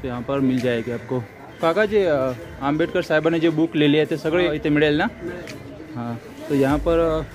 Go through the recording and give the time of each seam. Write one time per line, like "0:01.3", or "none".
0:01.4
0:04.5